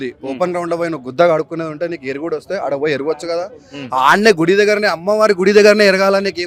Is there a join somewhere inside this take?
no; 0 cuts

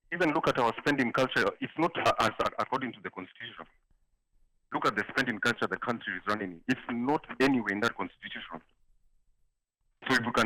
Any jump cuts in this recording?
no; 0 cuts

